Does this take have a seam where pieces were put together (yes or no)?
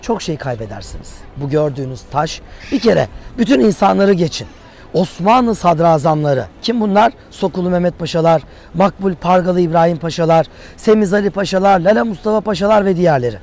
no